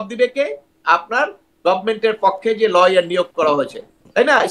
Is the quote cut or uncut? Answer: uncut